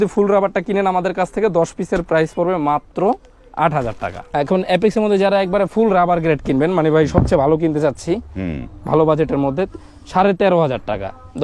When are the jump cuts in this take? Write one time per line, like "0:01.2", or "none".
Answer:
0:04.2